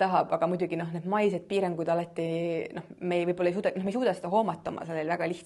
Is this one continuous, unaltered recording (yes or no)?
yes